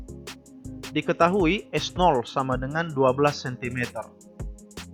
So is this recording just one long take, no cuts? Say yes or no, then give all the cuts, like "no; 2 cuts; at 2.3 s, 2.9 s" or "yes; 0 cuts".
no; 1 cut; at 0.9 s